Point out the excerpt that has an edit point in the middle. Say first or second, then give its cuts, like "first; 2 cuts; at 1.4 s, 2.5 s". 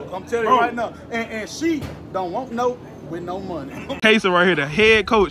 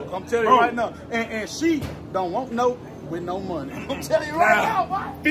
first; 1 cut; at 4.0 s